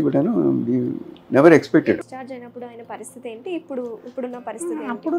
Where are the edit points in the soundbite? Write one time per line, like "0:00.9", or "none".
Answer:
0:01.9